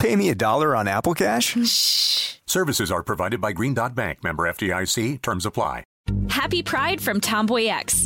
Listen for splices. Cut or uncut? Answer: cut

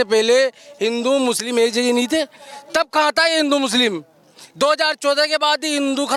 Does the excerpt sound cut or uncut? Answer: uncut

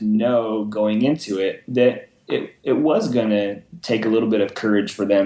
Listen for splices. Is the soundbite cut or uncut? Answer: uncut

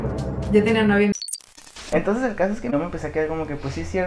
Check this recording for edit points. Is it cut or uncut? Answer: cut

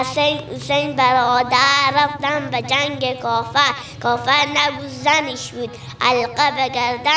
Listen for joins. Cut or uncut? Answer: uncut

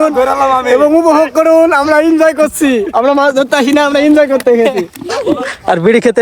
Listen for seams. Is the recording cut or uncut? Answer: uncut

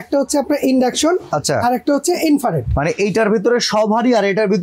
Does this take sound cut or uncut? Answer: uncut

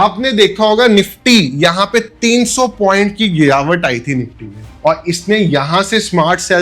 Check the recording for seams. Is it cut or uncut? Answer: uncut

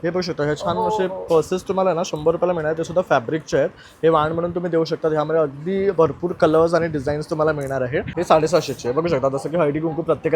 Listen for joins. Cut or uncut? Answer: cut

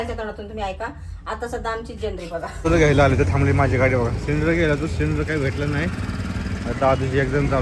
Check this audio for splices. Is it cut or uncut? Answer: uncut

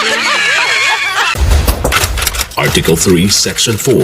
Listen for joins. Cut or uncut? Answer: cut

